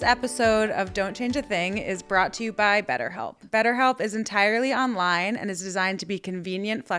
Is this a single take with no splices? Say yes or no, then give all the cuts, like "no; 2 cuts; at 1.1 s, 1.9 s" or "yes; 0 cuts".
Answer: no; 1 cut; at 3.4 s